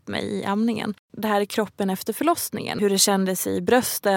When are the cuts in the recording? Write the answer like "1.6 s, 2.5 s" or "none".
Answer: 1.0 s, 2.8 s